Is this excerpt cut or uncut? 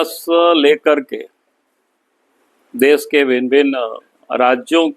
uncut